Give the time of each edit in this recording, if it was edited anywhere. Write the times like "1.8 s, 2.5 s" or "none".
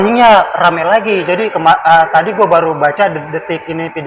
none